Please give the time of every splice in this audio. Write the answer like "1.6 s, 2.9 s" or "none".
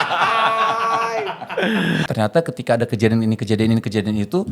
2.1 s